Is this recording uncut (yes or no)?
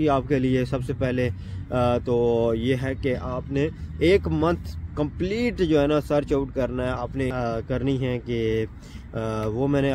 no